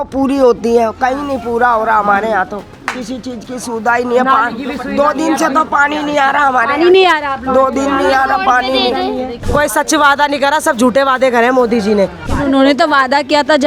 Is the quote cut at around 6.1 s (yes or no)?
no